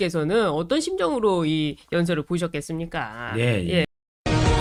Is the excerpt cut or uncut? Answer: uncut